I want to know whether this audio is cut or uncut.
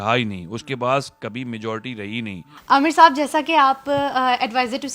cut